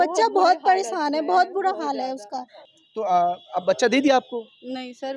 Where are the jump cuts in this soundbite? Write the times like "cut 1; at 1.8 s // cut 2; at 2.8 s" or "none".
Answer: cut 1; at 2.5 s